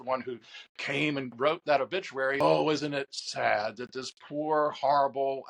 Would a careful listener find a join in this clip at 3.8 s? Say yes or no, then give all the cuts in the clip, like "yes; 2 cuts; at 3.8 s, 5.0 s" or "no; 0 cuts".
no; 2 cuts; at 1.3 s, 2.4 s